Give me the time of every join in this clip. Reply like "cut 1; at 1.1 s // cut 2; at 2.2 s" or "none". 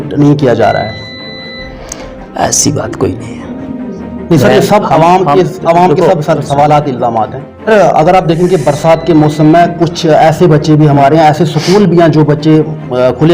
cut 1; at 7.7 s